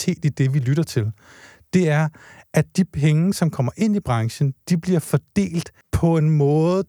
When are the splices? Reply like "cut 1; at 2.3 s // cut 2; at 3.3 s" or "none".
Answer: cut 1; at 5.8 s